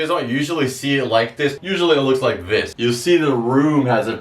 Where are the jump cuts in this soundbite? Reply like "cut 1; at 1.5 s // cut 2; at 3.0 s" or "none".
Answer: cut 1; at 1.6 s // cut 2; at 2.7 s